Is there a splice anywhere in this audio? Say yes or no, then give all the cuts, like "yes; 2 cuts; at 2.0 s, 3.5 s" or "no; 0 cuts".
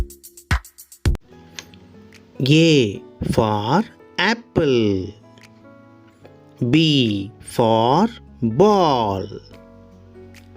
yes; 1 cut; at 1.2 s